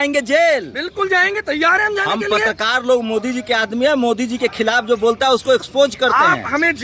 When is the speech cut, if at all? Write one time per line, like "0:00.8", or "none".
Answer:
none